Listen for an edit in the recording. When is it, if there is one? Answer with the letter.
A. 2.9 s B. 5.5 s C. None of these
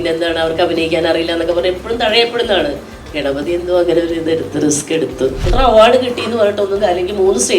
B